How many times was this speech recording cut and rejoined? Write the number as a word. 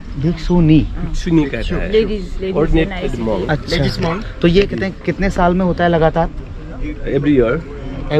zero